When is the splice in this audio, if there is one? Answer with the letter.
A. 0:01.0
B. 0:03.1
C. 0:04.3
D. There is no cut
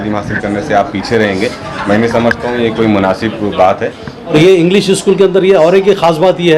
C